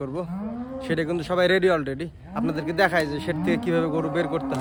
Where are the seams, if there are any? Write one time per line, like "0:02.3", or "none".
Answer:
none